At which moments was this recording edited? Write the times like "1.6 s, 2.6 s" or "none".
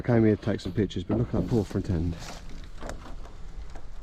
none